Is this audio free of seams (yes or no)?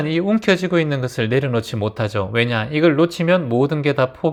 yes